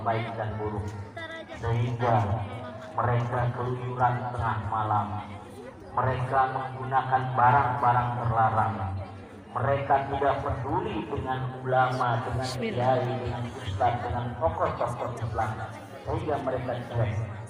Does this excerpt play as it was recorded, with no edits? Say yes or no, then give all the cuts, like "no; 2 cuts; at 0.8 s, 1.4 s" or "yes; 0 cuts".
yes; 0 cuts